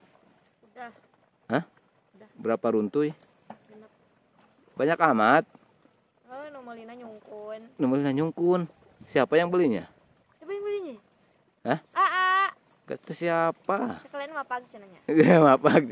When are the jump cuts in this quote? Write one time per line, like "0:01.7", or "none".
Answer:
none